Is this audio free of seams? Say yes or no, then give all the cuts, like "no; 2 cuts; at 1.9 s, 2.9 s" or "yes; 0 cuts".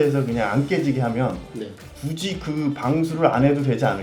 yes; 0 cuts